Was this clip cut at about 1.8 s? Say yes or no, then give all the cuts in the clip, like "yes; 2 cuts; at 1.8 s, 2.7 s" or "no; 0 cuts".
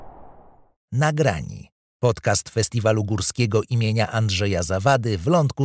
no; 0 cuts